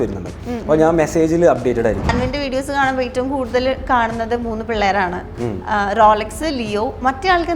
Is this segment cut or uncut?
cut